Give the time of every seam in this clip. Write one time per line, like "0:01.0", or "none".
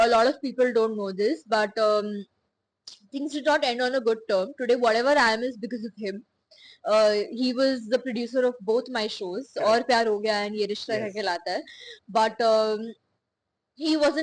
none

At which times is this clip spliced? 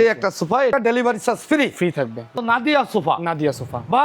0:00.7
0:02.4

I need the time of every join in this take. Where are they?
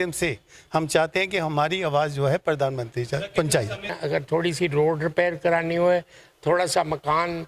0:04.0

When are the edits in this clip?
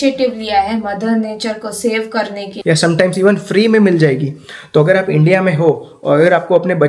0:02.5

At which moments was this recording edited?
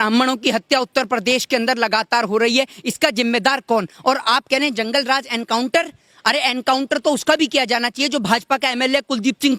none

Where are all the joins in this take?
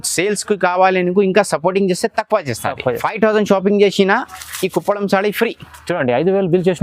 0:03.1

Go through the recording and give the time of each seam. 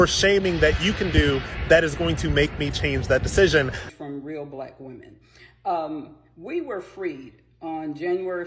0:04.0

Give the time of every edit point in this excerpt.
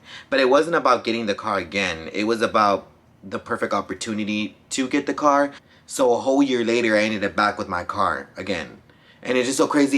0:05.7

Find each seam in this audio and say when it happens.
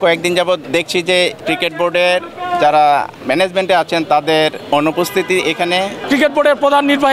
0:01.1
0:03.1
0:04.6
0:06.0

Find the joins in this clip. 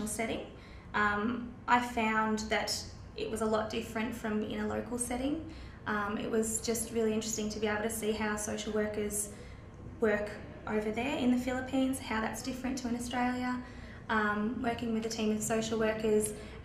0:15.5

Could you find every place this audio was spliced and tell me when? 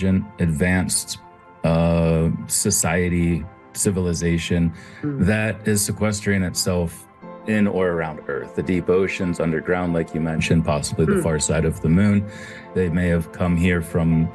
0:12.6

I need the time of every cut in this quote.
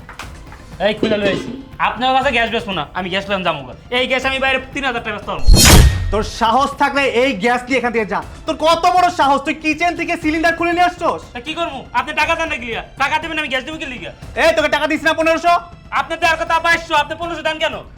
0:05.5
0:06.0

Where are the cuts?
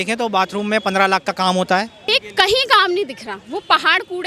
0:02.0

